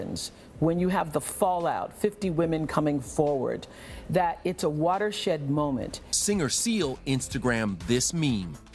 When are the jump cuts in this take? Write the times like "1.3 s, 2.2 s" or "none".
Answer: 6.0 s